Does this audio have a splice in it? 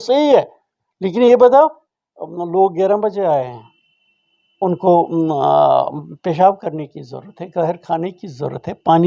no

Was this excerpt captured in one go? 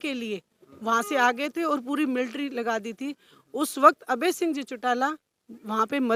yes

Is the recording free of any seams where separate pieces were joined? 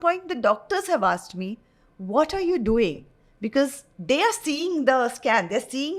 yes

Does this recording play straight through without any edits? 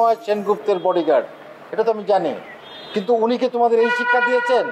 yes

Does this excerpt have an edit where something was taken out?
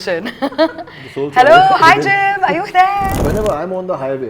yes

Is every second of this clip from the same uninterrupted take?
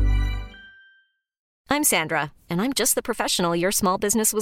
no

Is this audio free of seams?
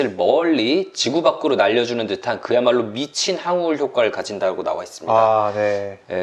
yes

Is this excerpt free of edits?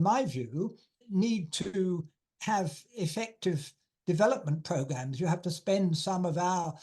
no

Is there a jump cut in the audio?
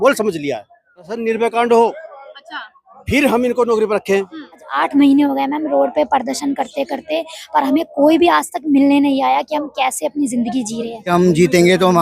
yes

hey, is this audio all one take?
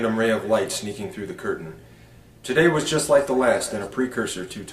no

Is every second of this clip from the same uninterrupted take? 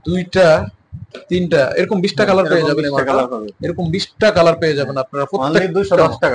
yes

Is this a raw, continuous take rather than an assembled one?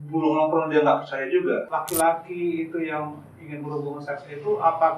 no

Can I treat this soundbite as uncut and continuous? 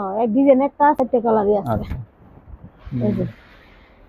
no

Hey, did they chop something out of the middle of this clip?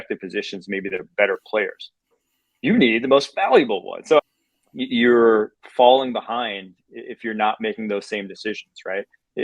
yes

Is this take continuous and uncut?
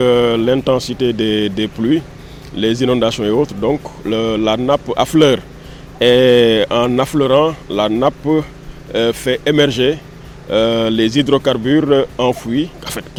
yes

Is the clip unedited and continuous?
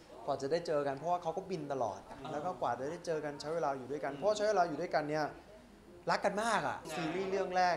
no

